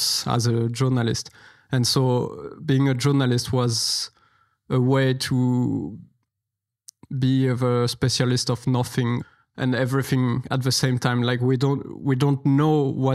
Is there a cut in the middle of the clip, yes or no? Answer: yes